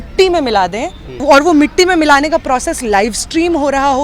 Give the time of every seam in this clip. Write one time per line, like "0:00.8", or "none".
0:01.2